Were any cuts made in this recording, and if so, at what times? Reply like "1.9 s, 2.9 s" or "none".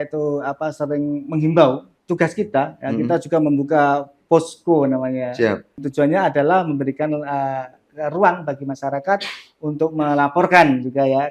1.9 s, 5.8 s